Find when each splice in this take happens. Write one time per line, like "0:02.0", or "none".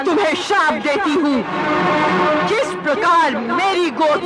0:01.6